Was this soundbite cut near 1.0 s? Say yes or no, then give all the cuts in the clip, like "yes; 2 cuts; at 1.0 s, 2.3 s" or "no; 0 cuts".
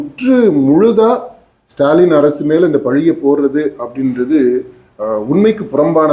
no; 0 cuts